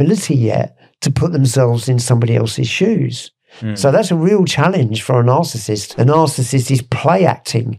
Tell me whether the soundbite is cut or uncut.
cut